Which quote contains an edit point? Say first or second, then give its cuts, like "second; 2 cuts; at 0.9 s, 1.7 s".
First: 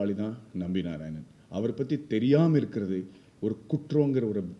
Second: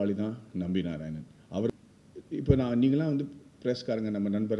second; 1 cut; at 1.7 s